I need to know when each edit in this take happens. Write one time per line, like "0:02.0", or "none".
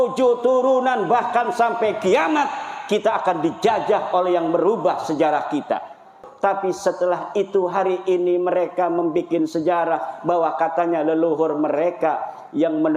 0:06.2